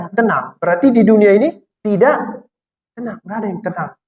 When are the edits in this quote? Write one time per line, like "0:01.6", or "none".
0:01.7